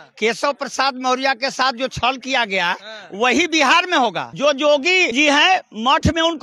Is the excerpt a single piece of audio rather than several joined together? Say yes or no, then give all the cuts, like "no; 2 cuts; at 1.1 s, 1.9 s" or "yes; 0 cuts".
no; 2 cuts; at 4.3 s, 5.1 s